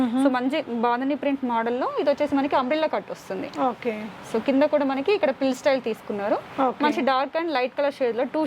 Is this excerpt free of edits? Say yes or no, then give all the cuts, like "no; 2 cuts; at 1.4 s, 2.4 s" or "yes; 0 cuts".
yes; 0 cuts